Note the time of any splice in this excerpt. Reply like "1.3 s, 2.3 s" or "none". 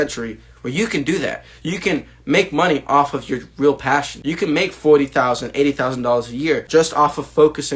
4.1 s, 6.6 s